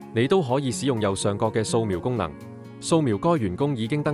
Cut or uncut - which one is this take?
uncut